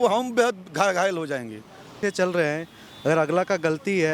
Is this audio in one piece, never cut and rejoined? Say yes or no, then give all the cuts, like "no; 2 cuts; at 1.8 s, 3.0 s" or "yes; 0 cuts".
no; 1 cut; at 2.0 s